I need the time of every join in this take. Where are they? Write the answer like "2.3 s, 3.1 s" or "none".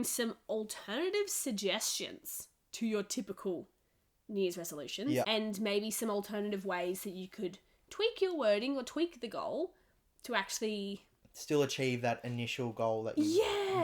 5.3 s